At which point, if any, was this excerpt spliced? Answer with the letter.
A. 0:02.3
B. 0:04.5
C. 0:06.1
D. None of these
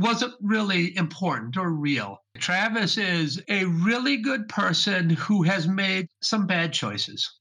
A